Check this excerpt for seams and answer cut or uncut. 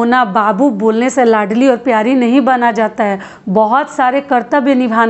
uncut